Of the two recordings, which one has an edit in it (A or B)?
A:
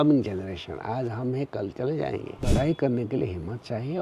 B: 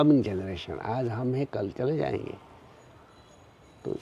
A